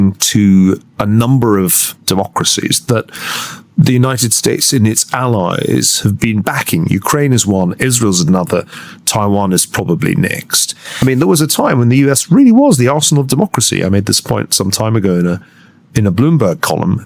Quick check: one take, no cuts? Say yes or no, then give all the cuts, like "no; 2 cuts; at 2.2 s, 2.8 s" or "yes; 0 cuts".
no; 1 cut; at 11.0 s